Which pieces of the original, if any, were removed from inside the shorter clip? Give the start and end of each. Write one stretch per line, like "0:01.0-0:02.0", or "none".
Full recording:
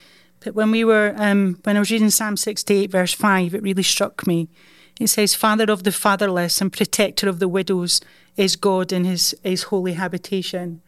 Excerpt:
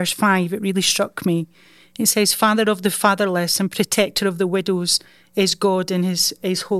none